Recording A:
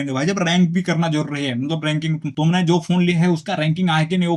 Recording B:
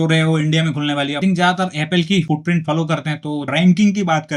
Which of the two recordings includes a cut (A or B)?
B